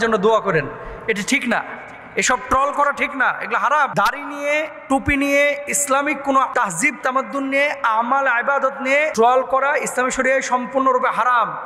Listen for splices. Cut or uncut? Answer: cut